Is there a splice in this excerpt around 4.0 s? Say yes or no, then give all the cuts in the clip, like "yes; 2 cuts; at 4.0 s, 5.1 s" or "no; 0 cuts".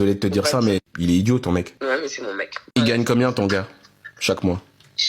no; 1 cut; at 1.7 s